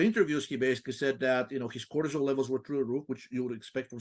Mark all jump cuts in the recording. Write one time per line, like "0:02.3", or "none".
none